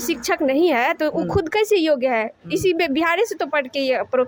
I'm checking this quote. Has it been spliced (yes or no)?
no